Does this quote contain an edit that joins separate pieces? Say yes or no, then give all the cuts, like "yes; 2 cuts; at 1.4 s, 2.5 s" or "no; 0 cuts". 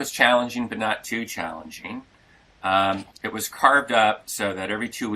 no; 0 cuts